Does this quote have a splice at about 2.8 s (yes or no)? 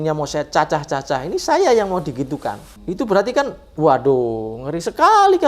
yes